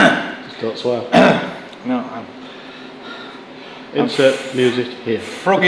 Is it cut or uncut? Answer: uncut